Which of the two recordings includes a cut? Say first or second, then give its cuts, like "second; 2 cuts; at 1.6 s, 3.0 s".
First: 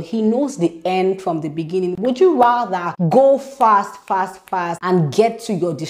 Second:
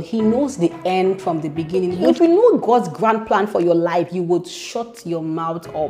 second; 1 cut; at 2.0 s